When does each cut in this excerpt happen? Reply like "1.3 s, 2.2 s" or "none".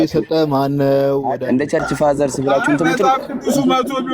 1.4 s

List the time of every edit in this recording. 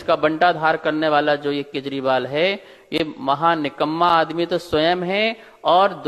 none

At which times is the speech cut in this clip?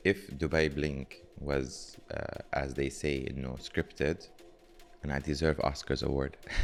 none

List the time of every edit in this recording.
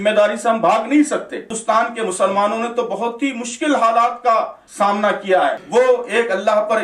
1.5 s, 4.6 s, 5.6 s

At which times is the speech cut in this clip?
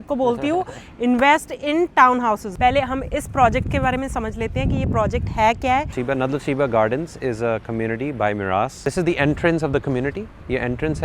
2.5 s, 6.0 s, 8.8 s

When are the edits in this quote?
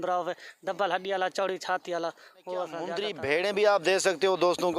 3.1 s

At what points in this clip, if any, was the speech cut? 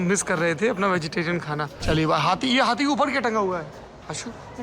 1.7 s

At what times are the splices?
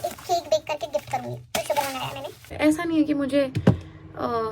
2.5 s

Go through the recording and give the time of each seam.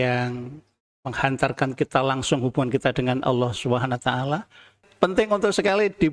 4.8 s

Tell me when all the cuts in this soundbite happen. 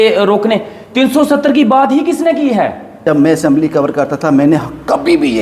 3.0 s

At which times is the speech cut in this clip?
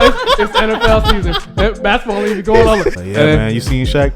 2.9 s

